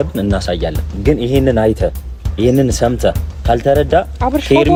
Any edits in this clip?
no; 0 cuts

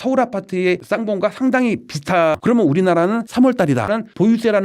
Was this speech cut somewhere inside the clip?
yes; 2 cuts; at 2.4 s, 3.9 s

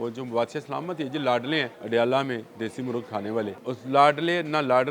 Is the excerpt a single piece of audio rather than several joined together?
no; 2 cuts; at 1.8 s, 3.6 s

